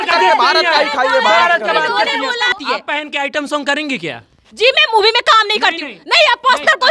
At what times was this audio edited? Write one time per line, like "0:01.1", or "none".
0:02.5